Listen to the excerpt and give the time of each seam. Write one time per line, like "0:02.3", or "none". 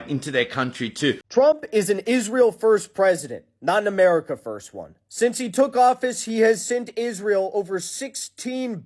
0:01.2